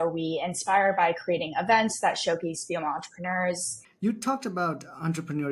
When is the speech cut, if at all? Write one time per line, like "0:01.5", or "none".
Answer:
0:03.8